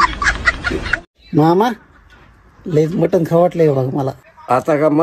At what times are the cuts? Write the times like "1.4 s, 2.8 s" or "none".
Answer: 1.1 s